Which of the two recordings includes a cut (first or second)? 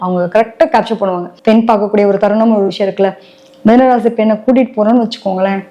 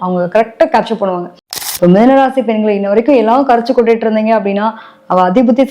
second